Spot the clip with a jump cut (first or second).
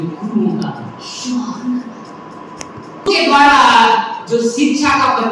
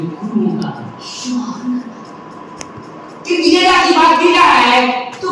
first